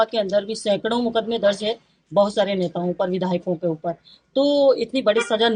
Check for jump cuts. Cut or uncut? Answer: uncut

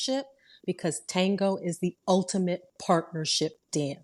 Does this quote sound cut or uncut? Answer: uncut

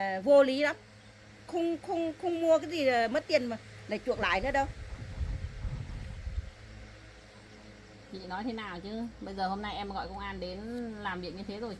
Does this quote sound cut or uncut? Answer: uncut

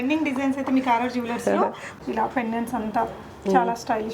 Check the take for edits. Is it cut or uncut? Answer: cut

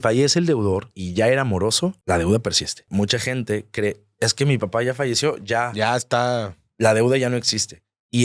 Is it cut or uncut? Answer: cut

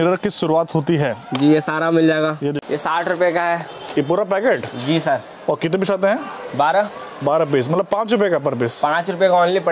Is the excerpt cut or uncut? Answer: cut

